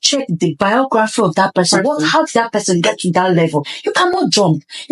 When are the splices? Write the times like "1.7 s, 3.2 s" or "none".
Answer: none

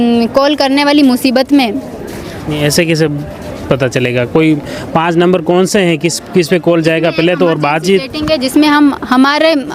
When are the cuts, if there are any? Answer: none

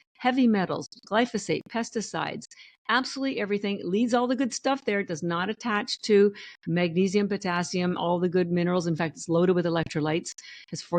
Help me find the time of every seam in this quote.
none

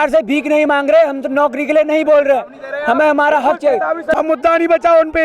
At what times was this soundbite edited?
4.1 s

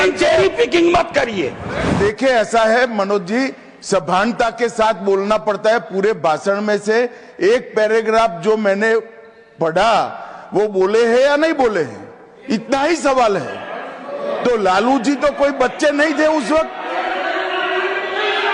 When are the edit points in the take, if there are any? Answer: none

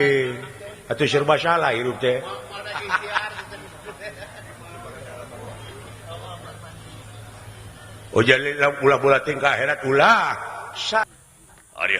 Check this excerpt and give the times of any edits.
11.0 s

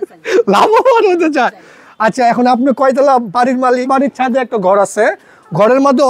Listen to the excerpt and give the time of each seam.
3.9 s

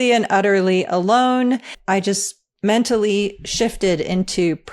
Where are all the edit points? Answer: 1.7 s

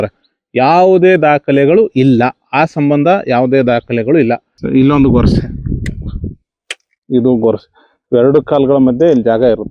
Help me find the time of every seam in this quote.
4.5 s

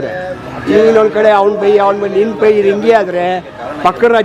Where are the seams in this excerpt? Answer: none

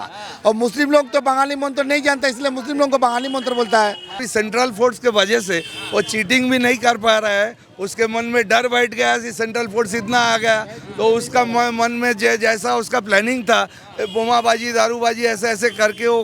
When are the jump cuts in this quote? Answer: 4.2 s

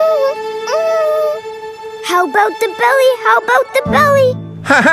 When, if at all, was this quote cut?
none

